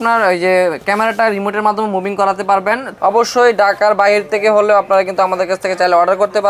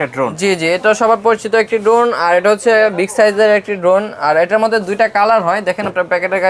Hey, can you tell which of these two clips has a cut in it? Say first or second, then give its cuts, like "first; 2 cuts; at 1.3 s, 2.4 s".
first; 1 cut; at 2.9 s